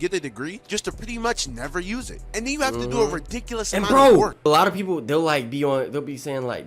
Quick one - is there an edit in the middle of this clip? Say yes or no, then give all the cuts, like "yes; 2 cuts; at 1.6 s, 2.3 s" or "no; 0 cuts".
yes; 1 cut; at 4.5 s